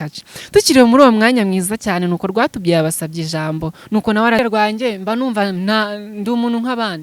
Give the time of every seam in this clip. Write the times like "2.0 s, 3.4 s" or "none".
4.4 s